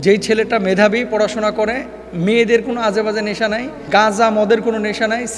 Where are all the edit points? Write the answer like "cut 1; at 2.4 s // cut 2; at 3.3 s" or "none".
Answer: cut 1; at 3.9 s